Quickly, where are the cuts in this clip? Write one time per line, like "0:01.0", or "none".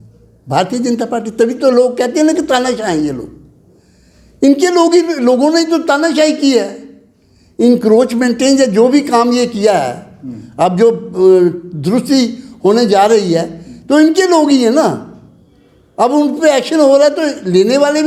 none